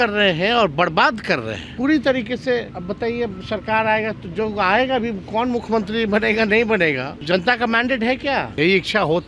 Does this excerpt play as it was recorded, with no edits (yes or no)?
no